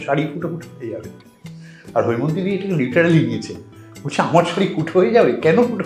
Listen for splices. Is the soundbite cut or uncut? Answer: uncut